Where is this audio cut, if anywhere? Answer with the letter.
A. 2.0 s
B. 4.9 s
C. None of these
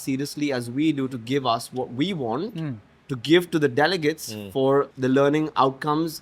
B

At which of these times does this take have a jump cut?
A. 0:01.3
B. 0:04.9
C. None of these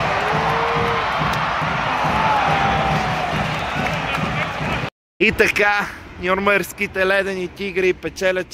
C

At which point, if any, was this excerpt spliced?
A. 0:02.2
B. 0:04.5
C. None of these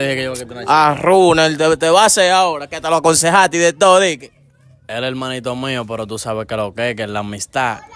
C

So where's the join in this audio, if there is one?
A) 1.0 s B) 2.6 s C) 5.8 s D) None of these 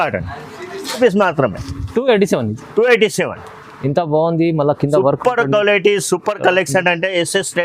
A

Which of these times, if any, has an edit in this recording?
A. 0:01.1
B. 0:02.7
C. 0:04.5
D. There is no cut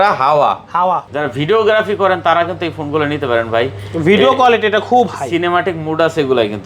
A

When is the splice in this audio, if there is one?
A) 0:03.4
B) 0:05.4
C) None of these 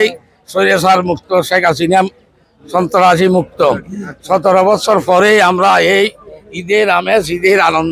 C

